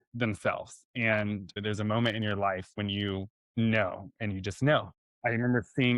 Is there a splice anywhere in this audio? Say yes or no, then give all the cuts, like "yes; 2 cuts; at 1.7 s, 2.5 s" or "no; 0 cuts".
yes; 3 cuts; at 1.6 s, 3.4 s, 5.0 s